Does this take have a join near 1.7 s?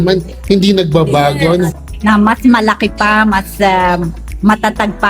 yes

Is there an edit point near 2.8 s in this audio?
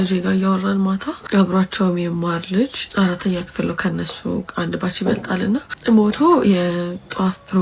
yes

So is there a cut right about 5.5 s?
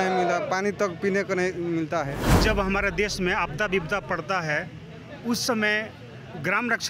no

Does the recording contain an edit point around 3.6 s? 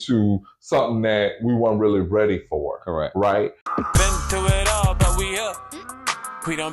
yes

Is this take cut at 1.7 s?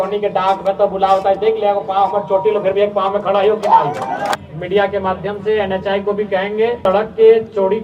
no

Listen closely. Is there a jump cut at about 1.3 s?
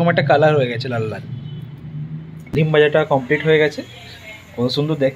no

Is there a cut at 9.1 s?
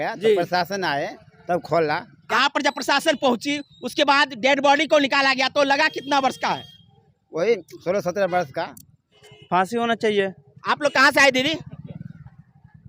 yes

